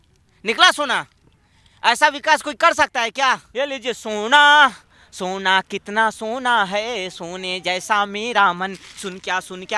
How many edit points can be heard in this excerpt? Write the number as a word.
one